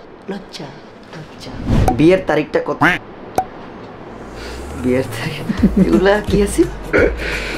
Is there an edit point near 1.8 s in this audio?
yes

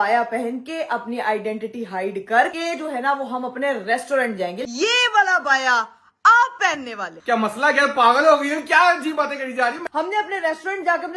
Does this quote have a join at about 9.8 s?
yes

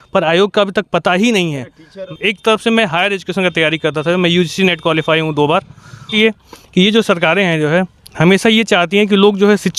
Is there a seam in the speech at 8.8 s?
no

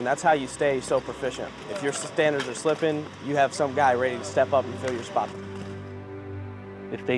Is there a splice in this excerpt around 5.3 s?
yes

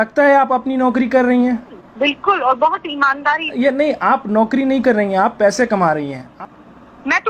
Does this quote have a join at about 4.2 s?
no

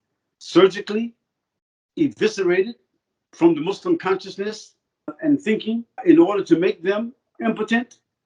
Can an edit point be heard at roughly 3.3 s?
no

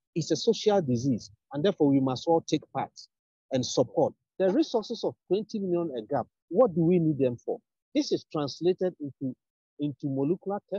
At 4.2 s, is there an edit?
yes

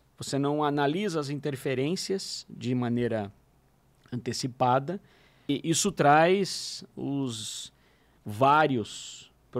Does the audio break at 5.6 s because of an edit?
yes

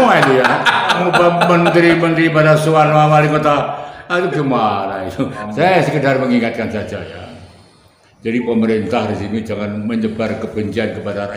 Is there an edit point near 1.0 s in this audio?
yes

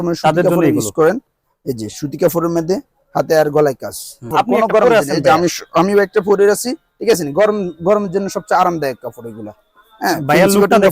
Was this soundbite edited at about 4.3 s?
yes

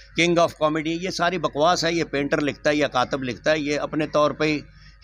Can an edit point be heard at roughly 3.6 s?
no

